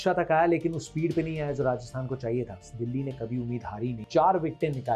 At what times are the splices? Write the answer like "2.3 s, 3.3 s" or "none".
2.6 s, 4.0 s